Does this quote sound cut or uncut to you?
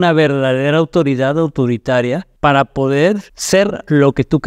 cut